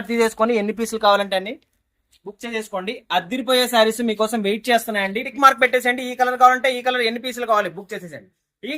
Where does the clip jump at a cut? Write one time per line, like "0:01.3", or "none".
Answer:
0:05.2